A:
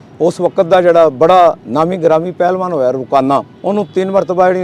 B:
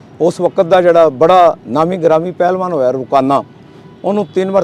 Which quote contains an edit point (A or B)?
A